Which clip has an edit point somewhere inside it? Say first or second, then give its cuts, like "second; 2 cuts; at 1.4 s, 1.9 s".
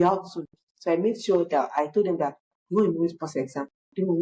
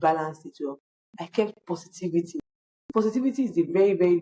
second; 1 cut; at 0.9 s